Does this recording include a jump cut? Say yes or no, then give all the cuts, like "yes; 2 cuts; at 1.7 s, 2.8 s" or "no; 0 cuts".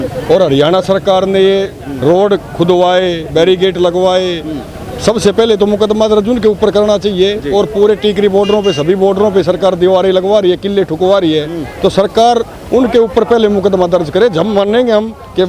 no; 0 cuts